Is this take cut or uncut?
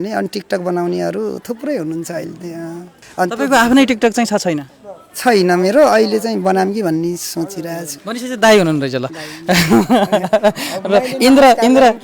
cut